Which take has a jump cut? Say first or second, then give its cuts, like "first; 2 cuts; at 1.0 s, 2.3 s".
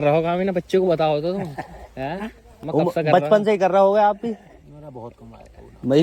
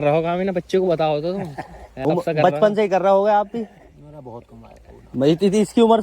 second; 1 cut; at 1.8 s